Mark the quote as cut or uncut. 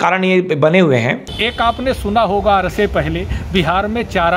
cut